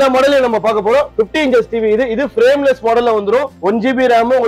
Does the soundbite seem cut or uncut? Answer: cut